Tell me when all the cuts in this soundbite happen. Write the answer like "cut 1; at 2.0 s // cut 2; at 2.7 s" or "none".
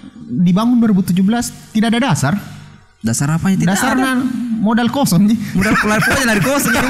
none